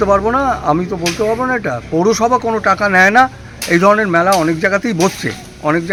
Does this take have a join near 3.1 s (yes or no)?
no